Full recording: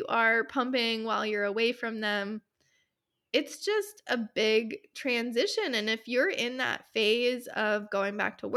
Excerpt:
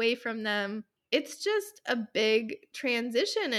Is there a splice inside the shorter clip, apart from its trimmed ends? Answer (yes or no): yes